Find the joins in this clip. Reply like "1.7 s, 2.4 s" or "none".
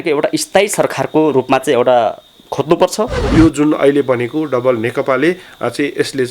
3.2 s